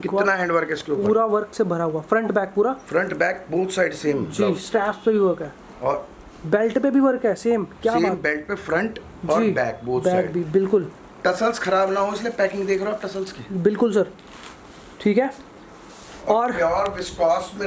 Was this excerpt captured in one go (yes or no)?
yes